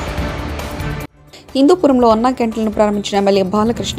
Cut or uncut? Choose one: uncut